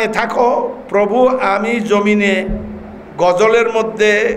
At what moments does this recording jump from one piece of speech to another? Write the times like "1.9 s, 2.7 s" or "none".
none